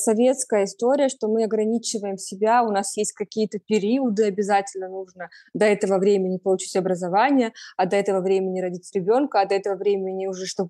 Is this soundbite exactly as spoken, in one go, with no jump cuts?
yes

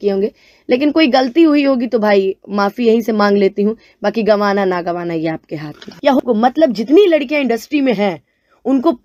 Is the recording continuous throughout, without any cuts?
no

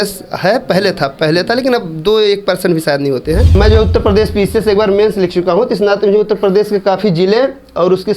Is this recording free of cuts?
no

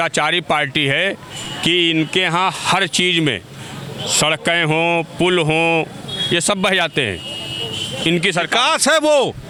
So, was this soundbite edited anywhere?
no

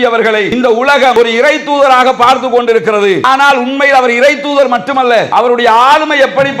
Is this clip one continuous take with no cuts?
no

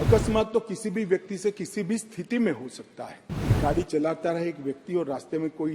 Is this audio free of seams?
no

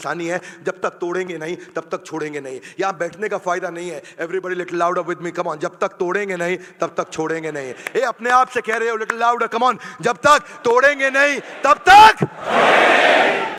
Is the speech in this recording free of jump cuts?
yes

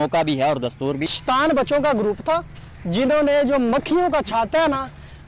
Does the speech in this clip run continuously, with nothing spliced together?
no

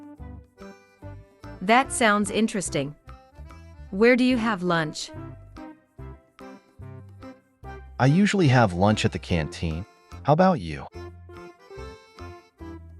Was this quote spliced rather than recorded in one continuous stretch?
yes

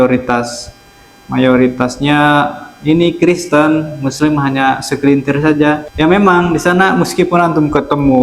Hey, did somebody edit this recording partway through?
yes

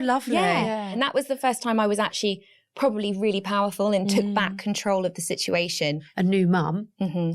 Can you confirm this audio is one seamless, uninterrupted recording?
no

